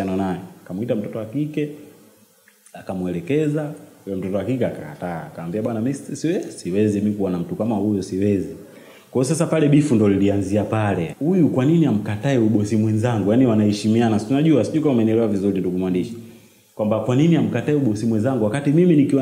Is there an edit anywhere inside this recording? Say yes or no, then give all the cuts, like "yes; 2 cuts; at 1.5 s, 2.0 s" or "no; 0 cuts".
yes; 1 cut; at 11.1 s